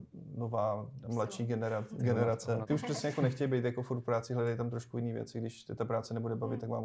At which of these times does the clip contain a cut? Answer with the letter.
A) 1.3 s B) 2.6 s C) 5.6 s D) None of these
B